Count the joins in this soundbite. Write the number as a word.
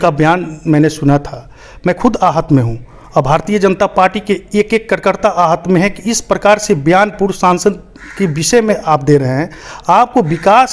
zero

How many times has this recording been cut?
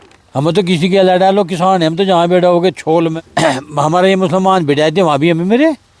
one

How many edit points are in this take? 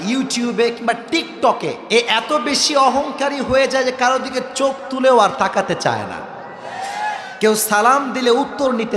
one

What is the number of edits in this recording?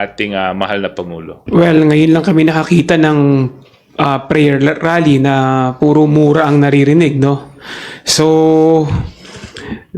one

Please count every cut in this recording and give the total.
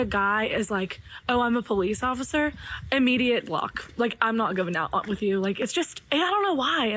zero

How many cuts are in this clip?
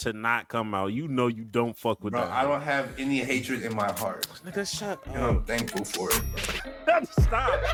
zero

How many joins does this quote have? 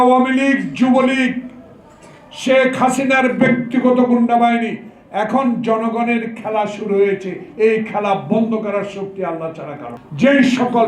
one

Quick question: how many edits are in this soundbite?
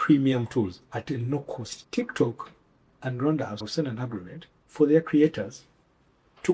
one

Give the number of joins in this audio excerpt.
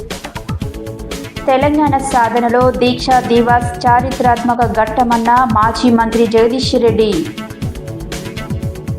zero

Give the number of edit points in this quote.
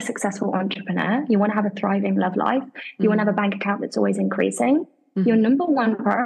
zero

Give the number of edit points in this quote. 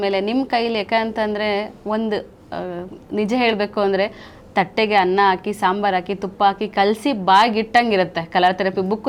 zero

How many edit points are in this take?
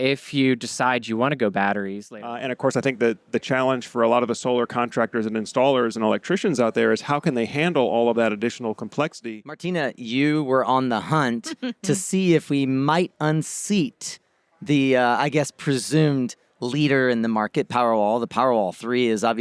two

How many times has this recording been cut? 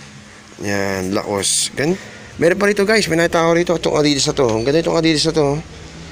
one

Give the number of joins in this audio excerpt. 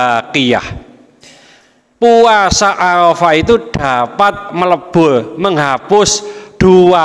zero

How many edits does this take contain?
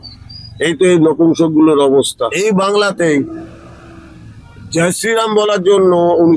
one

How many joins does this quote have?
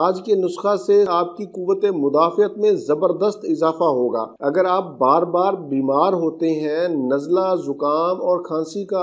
one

